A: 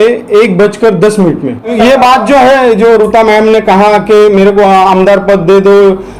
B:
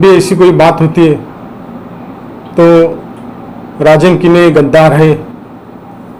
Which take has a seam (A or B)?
A